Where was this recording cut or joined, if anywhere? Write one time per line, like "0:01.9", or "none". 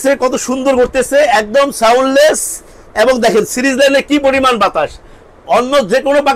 none